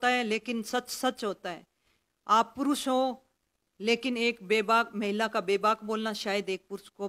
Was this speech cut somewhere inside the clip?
no; 0 cuts

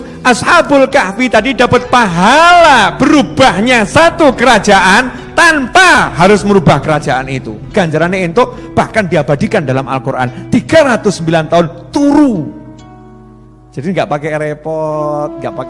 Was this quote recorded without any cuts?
yes; 0 cuts

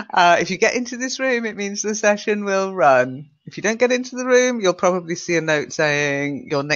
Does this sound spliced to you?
no; 0 cuts

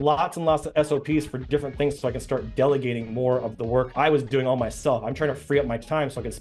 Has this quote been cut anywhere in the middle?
no; 0 cuts

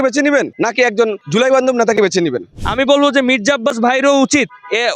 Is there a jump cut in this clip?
yes; 2 cuts; at 1.0 s, 2.5 s

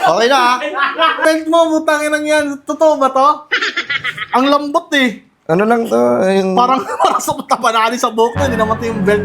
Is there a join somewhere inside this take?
yes; 1 cut; at 1.2 s

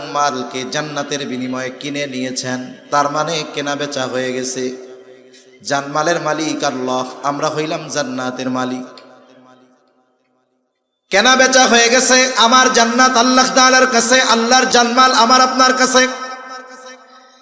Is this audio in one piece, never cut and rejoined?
no; 1 cut; at 14.7 s

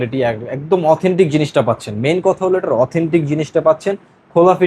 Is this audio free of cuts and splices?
yes; 0 cuts

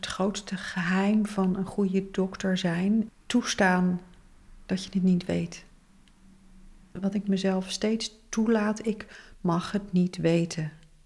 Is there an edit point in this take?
yes; 2 cuts; at 3.1 s, 6.9 s

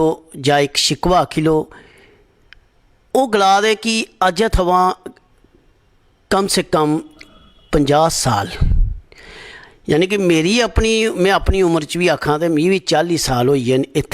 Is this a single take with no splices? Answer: yes; 0 cuts

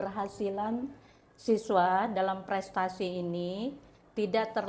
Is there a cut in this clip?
no; 0 cuts

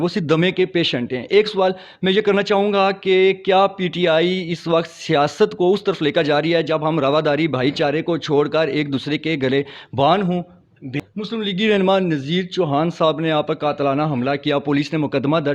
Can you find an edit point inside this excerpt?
yes; 1 cut; at 11.0 s

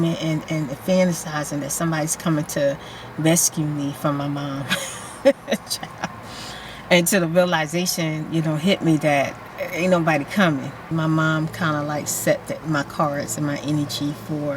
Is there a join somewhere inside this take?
yes; 1 cut; at 10.9 s

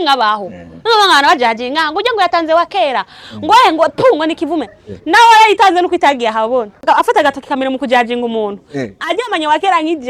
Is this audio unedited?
no; 1 cut; at 6.8 s

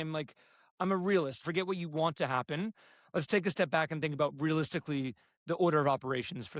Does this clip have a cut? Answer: yes; 1 cut; at 1.4 s

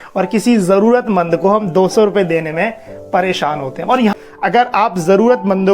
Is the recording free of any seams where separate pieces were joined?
no; 1 cut; at 4.1 s

